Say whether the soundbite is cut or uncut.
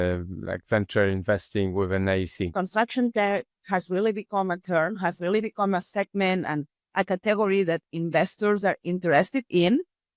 cut